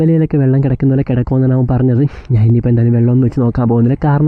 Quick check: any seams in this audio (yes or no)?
no